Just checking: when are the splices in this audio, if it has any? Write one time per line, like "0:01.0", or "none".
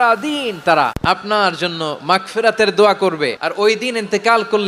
0:01.0
0:03.4